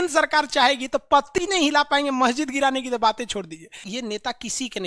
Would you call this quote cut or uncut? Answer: cut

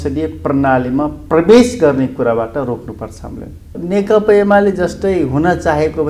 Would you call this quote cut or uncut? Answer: cut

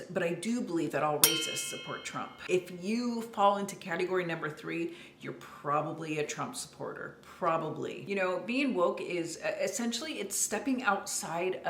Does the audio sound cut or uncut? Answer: cut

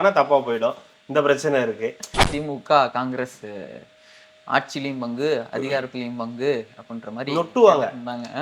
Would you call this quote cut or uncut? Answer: cut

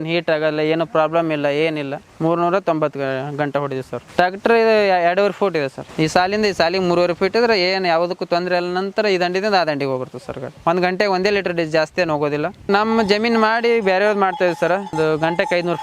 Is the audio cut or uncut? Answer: cut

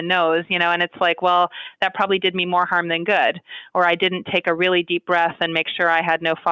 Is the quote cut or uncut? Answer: uncut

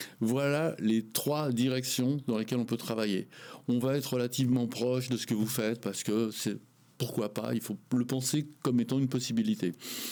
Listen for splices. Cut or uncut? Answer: uncut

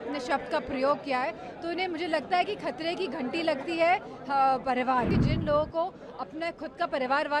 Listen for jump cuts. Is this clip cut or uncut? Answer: cut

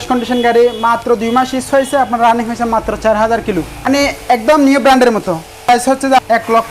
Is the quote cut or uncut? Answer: cut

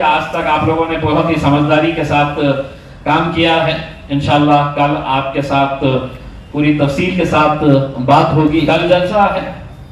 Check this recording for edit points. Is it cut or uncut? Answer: cut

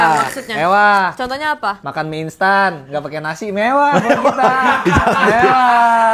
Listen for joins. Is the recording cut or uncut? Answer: uncut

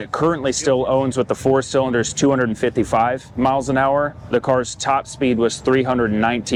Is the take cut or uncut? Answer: uncut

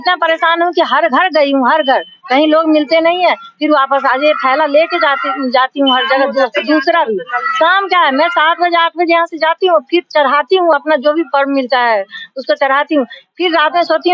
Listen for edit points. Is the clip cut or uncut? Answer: uncut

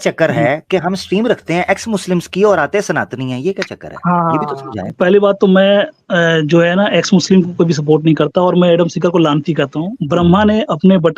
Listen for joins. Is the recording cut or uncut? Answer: cut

